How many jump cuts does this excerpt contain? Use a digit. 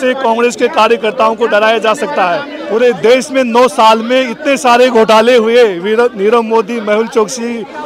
1